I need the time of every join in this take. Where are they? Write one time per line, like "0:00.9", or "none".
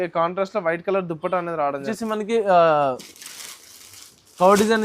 0:01.9